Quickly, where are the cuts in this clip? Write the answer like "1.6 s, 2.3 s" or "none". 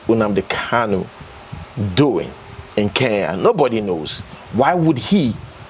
none